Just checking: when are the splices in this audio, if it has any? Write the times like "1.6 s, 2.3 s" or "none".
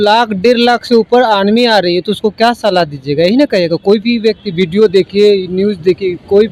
none